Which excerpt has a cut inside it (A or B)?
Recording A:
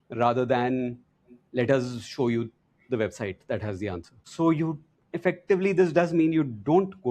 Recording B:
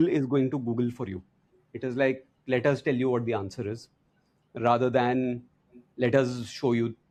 A